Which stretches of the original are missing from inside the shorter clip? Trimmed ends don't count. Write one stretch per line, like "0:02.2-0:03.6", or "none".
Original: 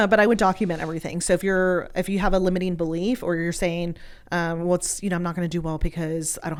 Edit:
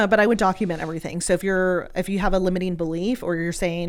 none